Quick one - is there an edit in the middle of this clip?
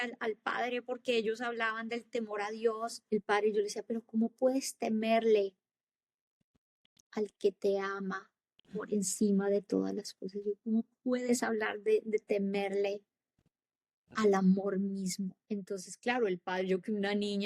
yes; 2 cuts; at 3.0 s, 15.4 s

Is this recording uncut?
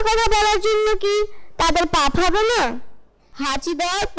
no; 1 cut; at 3.3 s

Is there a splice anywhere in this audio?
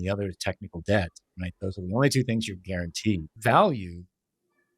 yes; 1 cut; at 3.3 s

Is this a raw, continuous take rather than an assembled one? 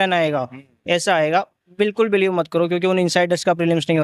yes; 0 cuts

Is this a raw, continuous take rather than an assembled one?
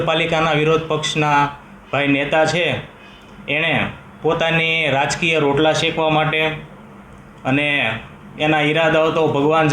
yes; 0 cuts

